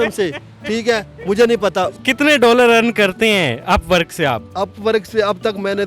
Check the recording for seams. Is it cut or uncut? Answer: cut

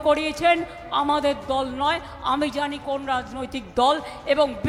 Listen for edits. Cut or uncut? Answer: uncut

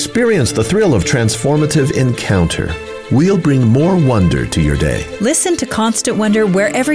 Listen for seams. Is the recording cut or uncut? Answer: uncut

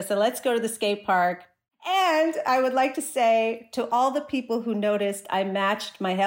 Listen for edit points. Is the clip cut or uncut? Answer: cut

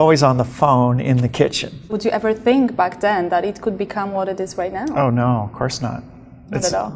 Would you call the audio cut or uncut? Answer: cut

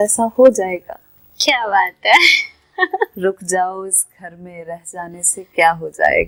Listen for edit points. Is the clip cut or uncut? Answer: uncut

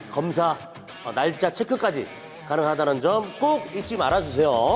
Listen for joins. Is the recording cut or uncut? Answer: uncut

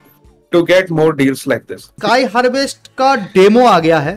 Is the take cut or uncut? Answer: cut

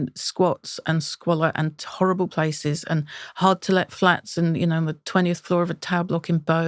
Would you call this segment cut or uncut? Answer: uncut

